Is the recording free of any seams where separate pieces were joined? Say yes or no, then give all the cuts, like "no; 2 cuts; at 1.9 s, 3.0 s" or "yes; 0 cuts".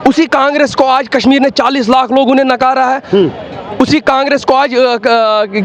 yes; 0 cuts